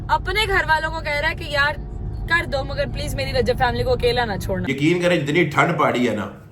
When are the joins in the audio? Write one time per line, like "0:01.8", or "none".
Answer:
0:04.8